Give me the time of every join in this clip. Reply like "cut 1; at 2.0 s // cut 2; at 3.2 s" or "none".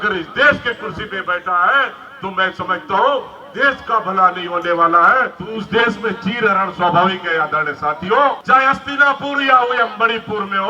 cut 1; at 5.4 s // cut 2; at 8.4 s